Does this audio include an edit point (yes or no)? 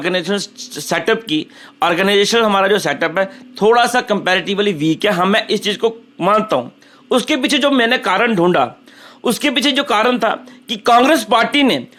no